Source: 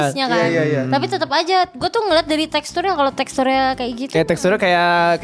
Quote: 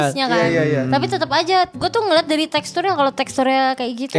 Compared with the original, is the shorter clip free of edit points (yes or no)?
yes